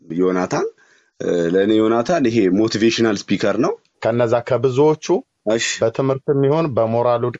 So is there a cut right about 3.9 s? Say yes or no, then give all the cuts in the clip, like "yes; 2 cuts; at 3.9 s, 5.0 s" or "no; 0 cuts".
yes; 1 cut; at 3.9 s